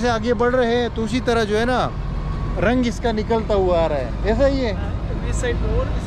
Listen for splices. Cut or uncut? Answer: uncut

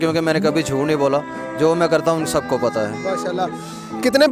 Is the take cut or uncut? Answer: uncut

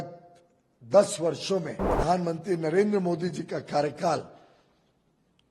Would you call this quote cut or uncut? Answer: cut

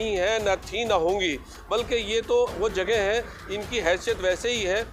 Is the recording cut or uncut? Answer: uncut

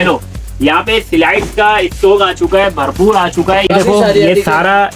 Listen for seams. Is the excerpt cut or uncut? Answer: cut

